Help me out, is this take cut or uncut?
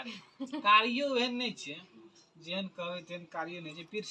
uncut